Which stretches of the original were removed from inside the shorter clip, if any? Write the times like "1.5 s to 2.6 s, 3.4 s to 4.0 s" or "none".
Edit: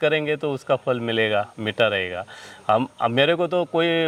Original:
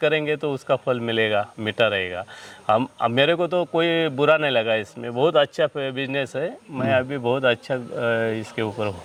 none